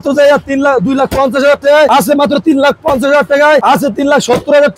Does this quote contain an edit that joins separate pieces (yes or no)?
no